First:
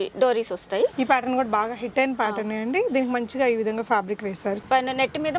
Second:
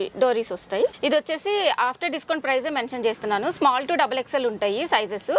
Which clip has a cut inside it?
first; 2 cuts; at 0.9 s, 4.6 s

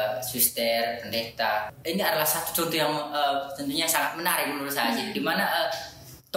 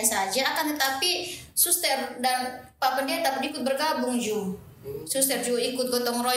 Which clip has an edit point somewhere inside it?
first; 1 cut; at 1.8 s

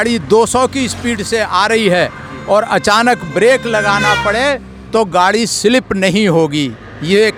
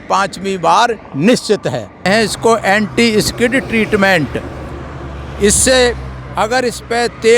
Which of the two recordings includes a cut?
second; 1 cut; at 2.1 s

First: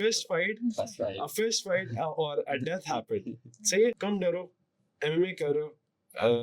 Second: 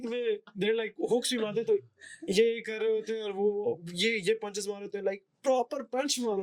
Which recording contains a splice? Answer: first; 1 cut; at 4.0 s

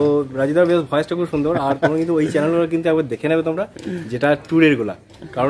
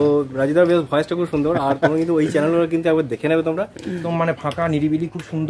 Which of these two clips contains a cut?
second; 1 cut; at 4.0 s

